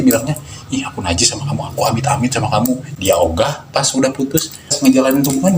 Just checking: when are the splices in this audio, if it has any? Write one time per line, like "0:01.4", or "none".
0:02.9
0:04.8